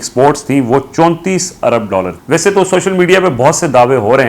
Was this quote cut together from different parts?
yes; 1 cut; at 2.2 s

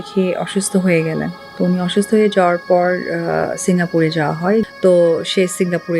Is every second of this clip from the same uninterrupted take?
no; 1 cut; at 4.7 s

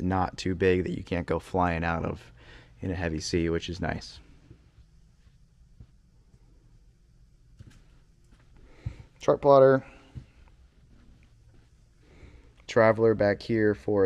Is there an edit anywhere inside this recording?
no; 0 cuts

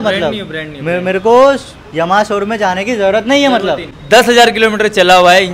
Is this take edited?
yes; 1 cut; at 3.9 s

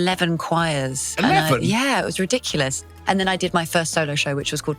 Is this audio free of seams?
no; 1 cut; at 2.8 s

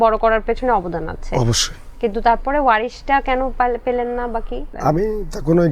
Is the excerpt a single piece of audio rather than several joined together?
no; 1 cut; at 4.6 s

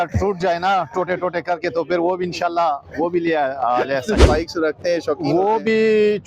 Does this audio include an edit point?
yes; 1 cut; at 4.2 s

